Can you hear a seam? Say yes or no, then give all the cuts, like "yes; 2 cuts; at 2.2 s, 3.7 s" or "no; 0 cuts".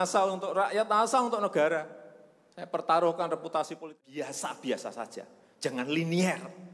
yes; 1 cut; at 3.9 s